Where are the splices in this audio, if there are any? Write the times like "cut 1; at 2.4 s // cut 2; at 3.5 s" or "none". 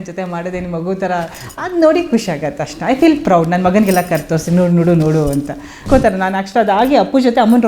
cut 1; at 5.8 s